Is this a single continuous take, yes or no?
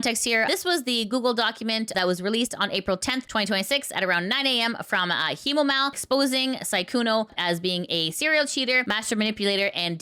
yes